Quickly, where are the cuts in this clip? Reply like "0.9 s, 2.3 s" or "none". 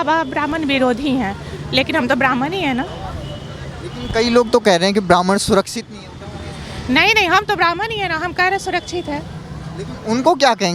none